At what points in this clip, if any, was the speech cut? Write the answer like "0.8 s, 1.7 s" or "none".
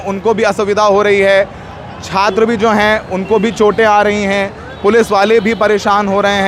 none